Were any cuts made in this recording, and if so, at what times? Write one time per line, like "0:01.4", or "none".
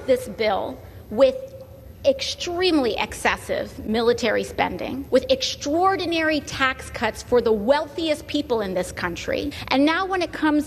0:04.9
0:09.6